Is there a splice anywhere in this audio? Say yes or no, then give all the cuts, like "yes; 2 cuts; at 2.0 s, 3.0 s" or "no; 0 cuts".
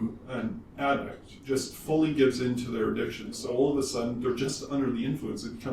yes; 2 cuts; at 1.4 s, 3.4 s